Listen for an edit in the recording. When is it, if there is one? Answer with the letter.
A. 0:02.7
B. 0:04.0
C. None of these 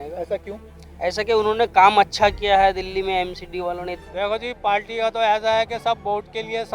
B